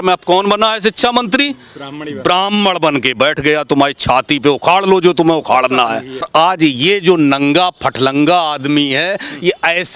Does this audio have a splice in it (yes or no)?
yes